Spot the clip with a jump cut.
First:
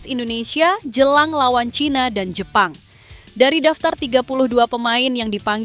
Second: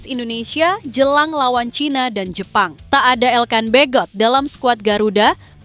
second; 1 cut; at 2.8 s

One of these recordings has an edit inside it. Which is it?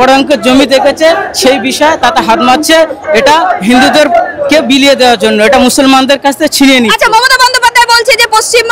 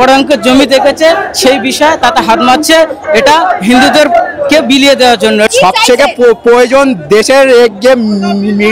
second; 1 cut; at 5.5 s

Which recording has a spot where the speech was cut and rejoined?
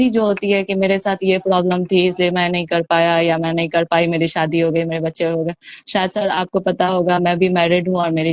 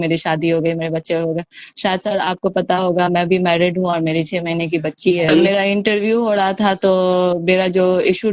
second; 1 cut; at 5.3 s

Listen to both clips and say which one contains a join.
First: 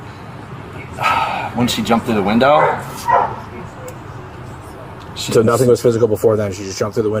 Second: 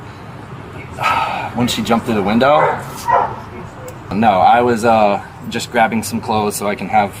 second; 1 cut; at 4.1 s

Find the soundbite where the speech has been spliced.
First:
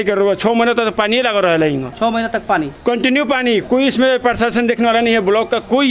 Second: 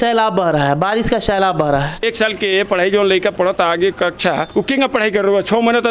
second; 1 cut; at 2.0 s

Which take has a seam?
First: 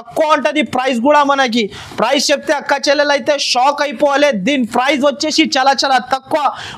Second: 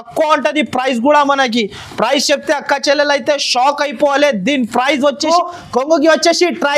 second; 1 cut; at 5.3 s

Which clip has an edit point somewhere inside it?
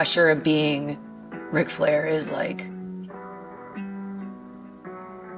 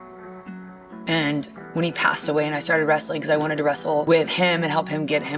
second; 2 cuts; at 1.5 s, 4.0 s

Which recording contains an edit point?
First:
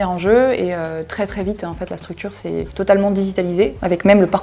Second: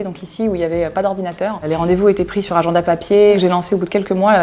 second; 1 cut; at 3.4 s

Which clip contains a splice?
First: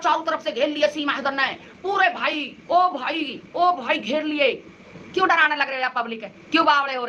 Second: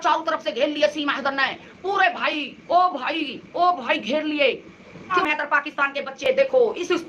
second; 1 cut; at 5.2 s

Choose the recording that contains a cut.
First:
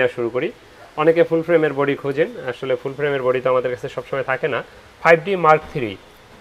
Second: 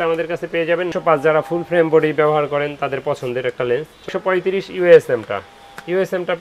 second; 2 cuts; at 0.9 s, 4.1 s

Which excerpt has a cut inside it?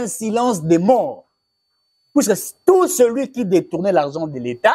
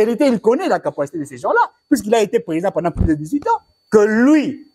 second; 1 cut; at 3.7 s

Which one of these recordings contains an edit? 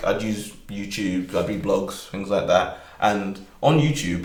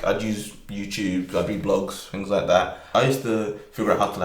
second; 1 cut; at 2.8 s

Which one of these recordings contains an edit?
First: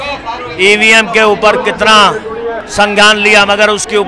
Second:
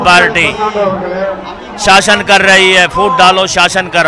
first; 1 cut; at 2.6 s

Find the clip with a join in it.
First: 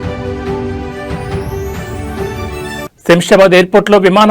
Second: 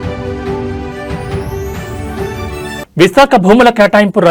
first; 1 cut; at 2.8 s

